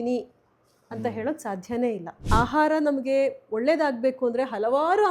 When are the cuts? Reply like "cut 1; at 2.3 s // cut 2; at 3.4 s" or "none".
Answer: cut 1; at 2.2 s